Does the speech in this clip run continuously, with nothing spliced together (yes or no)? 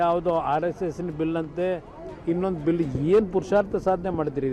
yes